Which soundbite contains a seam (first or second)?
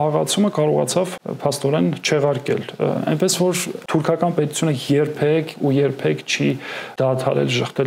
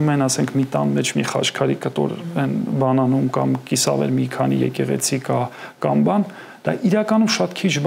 first